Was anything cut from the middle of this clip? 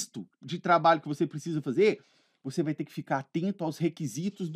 no; 0 cuts

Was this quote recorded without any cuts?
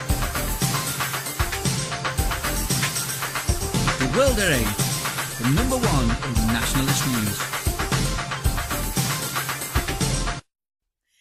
yes; 0 cuts

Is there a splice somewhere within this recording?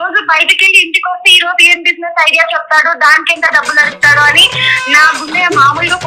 no; 0 cuts

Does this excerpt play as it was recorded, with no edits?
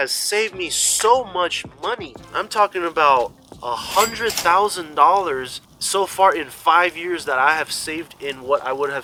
yes; 0 cuts

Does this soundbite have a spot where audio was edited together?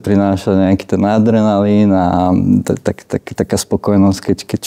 no; 0 cuts

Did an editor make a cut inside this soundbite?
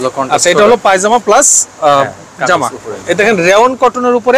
yes; 1 cut; at 2.9 s

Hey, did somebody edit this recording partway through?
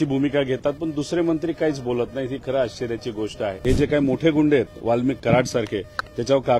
yes; 1 cut; at 3.6 s

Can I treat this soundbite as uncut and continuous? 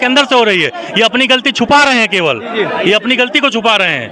yes; 0 cuts

